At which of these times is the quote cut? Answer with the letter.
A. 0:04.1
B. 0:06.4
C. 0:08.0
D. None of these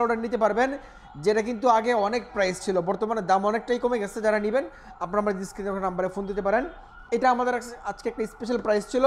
D